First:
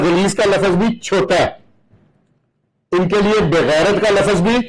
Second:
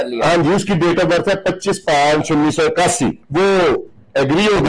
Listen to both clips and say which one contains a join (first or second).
second